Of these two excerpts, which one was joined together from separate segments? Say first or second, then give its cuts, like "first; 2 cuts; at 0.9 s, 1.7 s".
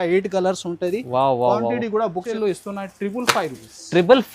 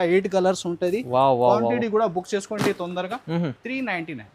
first; 1 cut; at 2.3 s